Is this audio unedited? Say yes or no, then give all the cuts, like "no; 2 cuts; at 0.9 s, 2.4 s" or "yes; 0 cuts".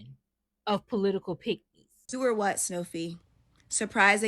no; 1 cut; at 2.1 s